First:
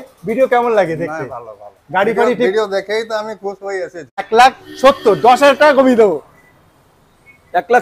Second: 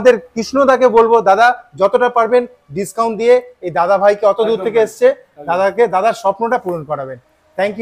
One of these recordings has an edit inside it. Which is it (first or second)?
first